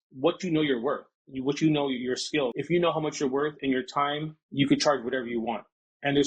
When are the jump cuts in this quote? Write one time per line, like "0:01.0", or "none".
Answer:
0:02.6